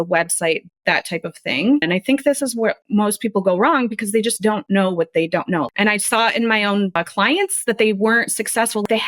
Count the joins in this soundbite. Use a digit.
2